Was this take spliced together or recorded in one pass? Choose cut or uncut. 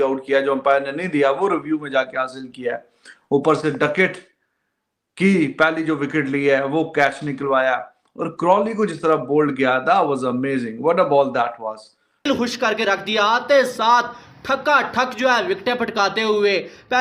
cut